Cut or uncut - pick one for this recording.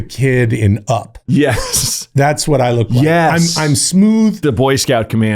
cut